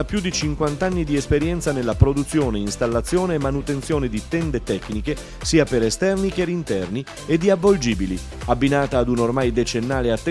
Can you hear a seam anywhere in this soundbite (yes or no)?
no